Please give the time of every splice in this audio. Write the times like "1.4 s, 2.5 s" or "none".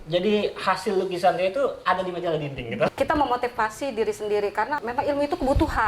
2.9 s, 4.8 s